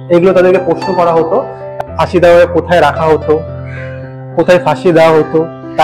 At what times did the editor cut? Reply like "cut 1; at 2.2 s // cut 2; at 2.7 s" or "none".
cut 1; at 1.8 s

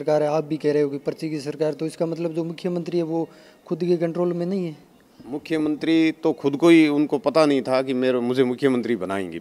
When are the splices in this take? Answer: none

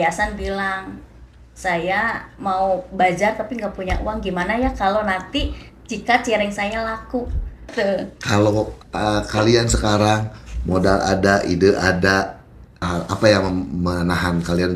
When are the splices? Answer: cut 1; at 7.7 s // cut 2; at 12.9 s

